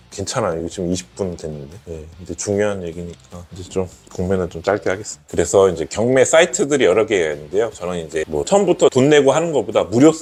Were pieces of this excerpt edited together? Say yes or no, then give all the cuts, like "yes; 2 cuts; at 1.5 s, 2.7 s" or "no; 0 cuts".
no; 0 cuts